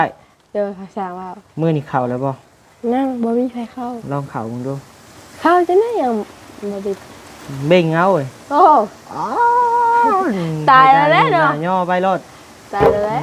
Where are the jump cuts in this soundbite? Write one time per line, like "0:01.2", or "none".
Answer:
none

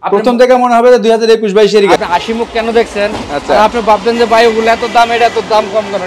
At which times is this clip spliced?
0:02.0

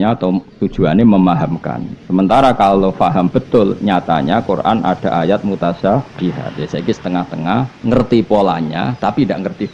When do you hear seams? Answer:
none

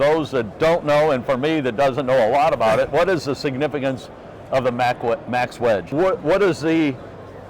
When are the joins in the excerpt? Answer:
0:05.9

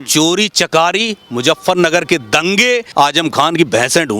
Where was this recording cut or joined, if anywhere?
0:02.9

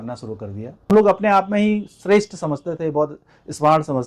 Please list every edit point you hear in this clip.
0:00.9

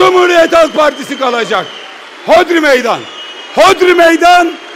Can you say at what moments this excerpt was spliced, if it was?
none

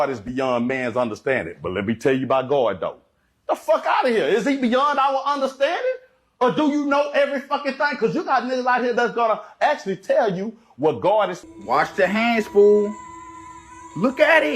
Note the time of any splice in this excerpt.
0:11.4

